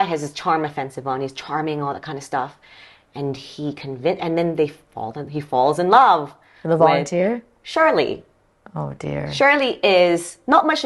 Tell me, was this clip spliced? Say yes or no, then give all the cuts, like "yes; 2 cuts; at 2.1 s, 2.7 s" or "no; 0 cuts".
no; 0 cuts